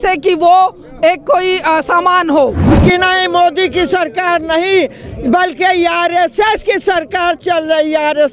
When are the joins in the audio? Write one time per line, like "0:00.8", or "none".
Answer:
0:02.7